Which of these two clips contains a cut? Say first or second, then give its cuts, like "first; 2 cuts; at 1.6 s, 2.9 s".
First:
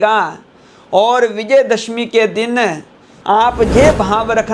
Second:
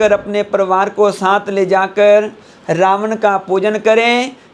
first; 1 cut; at 3.1 s